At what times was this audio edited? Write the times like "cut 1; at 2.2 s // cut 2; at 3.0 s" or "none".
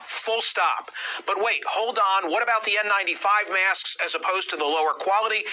cut 1; at 2.5 s

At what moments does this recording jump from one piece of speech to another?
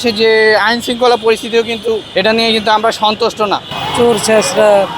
cut 1; at 2.1 s // cut 2; at 3.7 s

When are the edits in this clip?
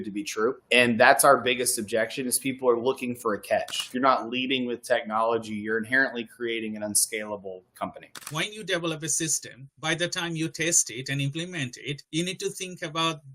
cut 1; at 3.8 s // cut 2; at 8.2 s

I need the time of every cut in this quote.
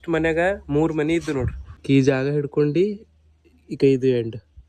cut 1; at 1.8 s

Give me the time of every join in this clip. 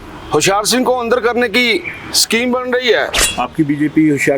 cut 1; at 3.2 s

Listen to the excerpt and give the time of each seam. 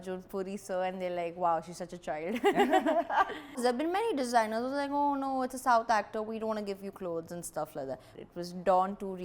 cut 1; at 3.6 s // cut 2; at 8.1 s

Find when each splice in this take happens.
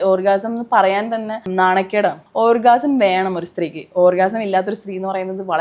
cut 1; at 1.5 s // cut 2; at 2.2 s

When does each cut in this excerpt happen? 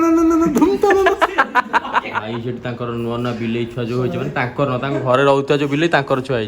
cut 1; at 2.2 s

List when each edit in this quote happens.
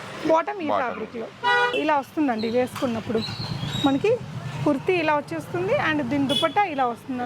cut 1; at 1.7 s

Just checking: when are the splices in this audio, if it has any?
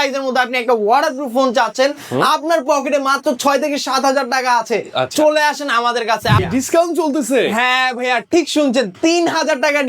cut 1; at 6.4 s

